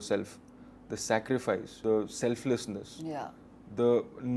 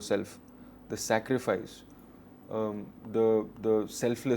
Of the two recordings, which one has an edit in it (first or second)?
first